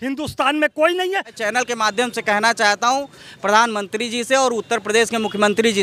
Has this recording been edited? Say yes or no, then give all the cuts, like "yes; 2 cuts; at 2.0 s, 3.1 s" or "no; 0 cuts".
yes; 1 cut; at 1.3 s